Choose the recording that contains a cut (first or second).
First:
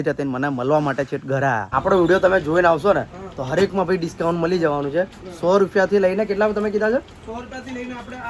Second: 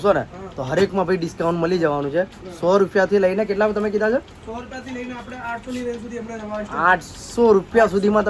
first